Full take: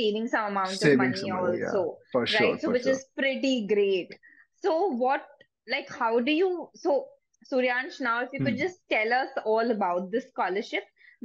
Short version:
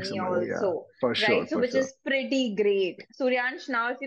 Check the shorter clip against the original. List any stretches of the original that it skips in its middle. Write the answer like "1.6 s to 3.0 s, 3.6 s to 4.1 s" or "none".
4.2 s to 7.4 s

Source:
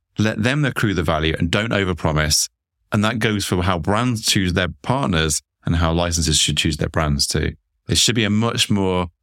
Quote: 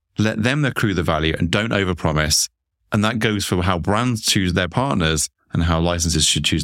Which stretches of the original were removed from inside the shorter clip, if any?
4.7 s to 4.8 s

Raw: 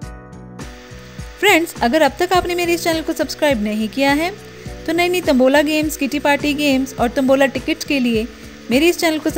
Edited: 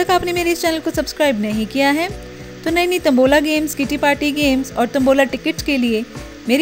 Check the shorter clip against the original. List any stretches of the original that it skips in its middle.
none

